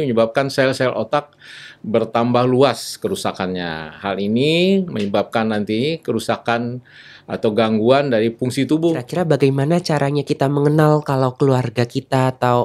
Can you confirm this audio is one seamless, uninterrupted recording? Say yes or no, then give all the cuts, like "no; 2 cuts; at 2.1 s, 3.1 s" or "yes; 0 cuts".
no; 1 cut; at 9.1 s